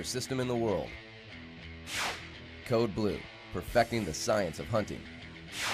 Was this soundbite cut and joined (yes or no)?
no